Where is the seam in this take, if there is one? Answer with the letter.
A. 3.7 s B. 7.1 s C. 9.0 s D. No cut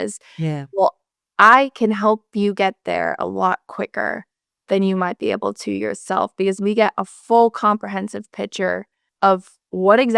C